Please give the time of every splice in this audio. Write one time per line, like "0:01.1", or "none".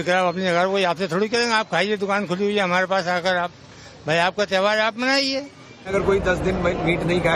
0:06.1